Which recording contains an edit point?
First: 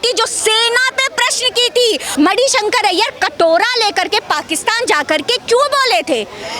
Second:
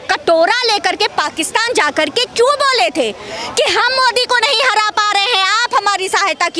first; 1 cut; at 2.1 s

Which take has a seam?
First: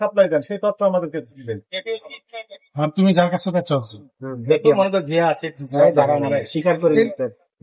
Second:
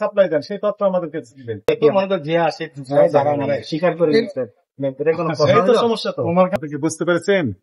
second; 2 cuts; at 1.6 s, 6.5 s

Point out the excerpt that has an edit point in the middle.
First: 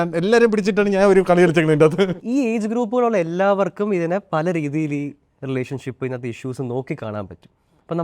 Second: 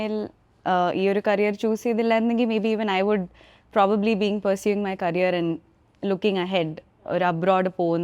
first; 1 cut; at 2.2 s

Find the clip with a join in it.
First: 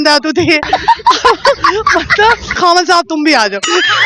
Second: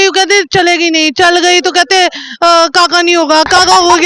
first; 1 cut; at 2.6 s

